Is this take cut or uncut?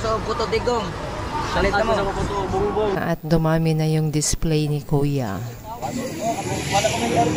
cut